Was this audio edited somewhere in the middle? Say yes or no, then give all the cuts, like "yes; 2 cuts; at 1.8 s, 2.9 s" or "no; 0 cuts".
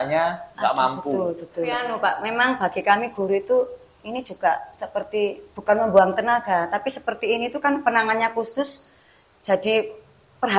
yes; 1 cut; at 1.9 s